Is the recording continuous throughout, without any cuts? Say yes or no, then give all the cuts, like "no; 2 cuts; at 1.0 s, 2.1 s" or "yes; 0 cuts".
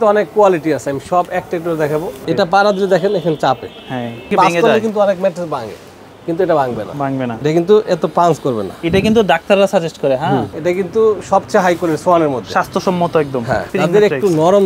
no; 5 cuts; at 2.2 s, 4.3 s, 7.4 s, 10.5 s, 13.7 s